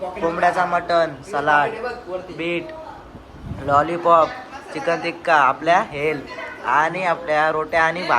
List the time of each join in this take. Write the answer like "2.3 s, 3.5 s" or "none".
none